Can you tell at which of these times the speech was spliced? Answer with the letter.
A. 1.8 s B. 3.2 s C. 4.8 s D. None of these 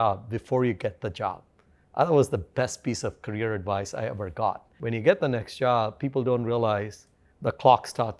C